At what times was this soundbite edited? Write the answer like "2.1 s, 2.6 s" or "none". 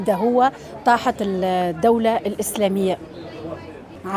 none